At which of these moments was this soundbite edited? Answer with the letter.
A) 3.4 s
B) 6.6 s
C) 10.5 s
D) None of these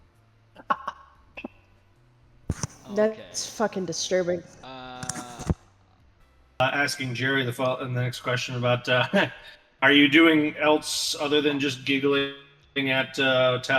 B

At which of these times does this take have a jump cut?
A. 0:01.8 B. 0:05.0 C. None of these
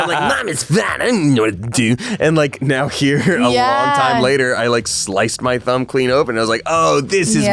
C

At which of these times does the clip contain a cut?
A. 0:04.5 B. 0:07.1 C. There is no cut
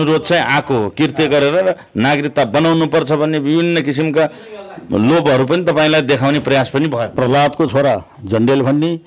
B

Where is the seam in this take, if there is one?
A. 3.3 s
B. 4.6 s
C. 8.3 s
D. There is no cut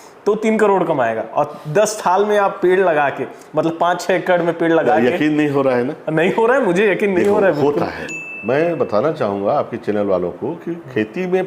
C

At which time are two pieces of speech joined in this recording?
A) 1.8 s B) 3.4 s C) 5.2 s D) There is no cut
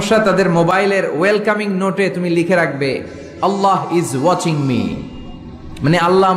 D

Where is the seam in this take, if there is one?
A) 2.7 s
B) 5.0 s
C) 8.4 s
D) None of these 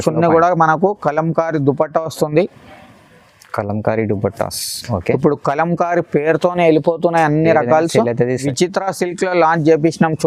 C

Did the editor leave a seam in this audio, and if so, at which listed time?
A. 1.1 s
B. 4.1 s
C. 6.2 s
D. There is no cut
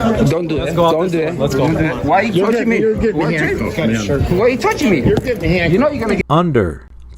C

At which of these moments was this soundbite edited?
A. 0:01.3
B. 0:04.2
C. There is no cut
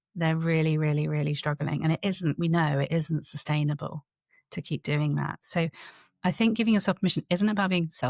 C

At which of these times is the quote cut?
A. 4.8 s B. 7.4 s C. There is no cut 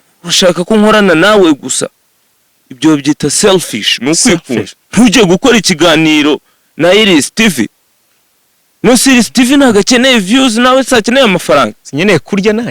A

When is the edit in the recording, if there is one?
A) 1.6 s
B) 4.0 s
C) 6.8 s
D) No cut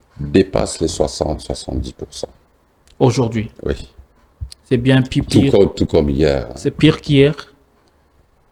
D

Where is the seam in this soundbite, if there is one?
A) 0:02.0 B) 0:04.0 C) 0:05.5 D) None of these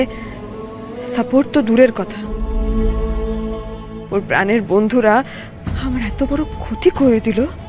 B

